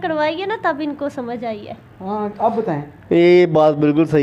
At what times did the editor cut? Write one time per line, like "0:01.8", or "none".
none